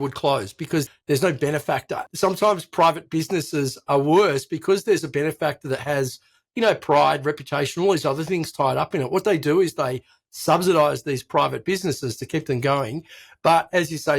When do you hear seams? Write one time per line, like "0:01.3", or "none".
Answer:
0:00.9
0:02.0